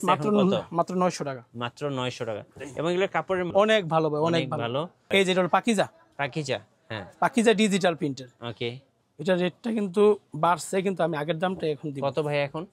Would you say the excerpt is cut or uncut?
cut